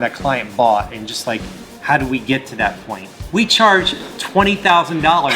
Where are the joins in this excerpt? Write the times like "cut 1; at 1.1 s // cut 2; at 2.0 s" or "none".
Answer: cut 1; at 3.1 s